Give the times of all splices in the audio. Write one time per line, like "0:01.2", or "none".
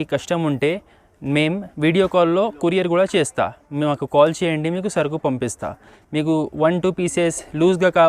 0:06.0